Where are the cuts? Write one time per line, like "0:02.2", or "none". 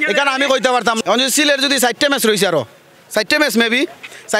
0:01.0